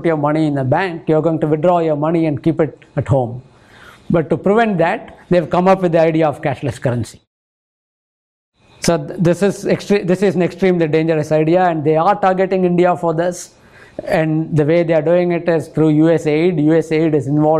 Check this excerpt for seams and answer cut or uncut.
uncut